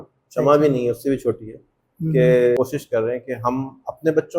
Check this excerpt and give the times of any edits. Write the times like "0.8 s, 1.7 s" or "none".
2.6 s